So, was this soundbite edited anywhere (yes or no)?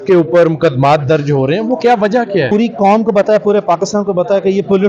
yes